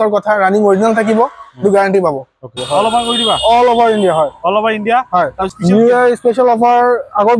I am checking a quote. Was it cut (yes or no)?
yes